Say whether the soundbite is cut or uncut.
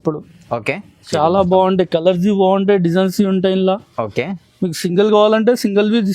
cut